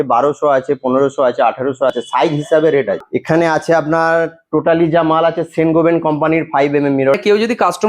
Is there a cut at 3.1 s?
yes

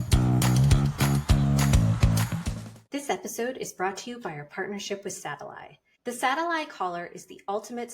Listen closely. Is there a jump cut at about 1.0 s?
yes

